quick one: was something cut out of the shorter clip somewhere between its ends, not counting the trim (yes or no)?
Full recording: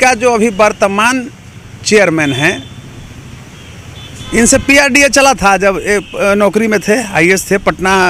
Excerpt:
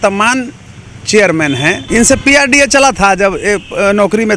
yes